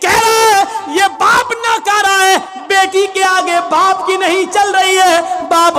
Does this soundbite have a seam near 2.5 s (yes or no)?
no